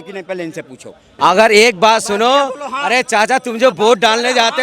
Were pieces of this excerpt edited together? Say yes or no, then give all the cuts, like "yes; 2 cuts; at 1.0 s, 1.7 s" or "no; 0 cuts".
yes; 1 cut; at 1.0 s